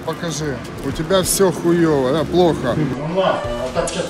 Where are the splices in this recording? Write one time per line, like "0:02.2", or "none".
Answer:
0:02.9